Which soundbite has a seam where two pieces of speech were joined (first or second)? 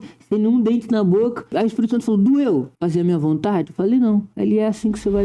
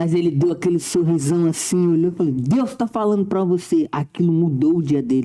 first